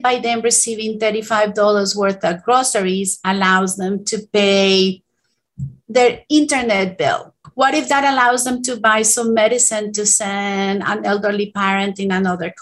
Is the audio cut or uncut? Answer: uncut